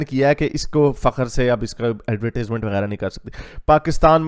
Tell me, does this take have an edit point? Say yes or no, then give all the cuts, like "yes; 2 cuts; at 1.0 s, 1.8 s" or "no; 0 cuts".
no; 0 cuts